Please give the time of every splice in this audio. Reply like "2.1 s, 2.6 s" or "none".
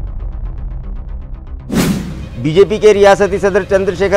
2.2 s